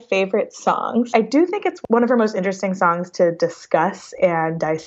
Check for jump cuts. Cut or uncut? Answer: cut